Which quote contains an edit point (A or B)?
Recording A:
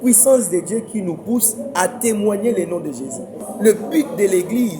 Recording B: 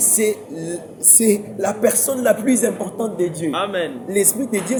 A